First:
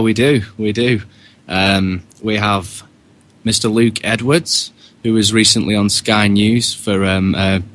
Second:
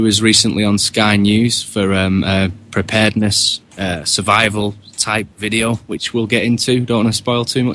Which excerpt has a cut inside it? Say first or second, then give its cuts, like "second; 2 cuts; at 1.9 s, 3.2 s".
first; 1 cut; at 3.7 s